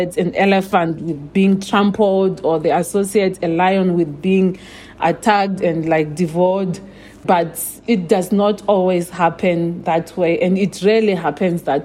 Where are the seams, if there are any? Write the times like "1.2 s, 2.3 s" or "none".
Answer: 7.2 s